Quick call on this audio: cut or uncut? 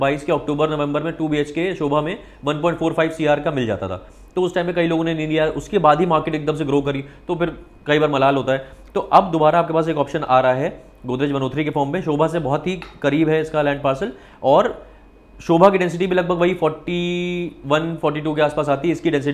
uncut